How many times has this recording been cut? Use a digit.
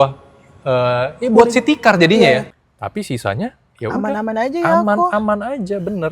1